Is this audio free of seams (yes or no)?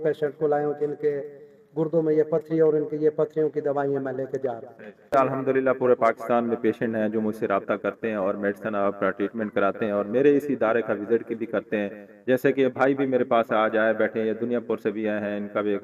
no